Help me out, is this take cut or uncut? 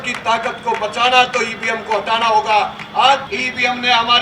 cut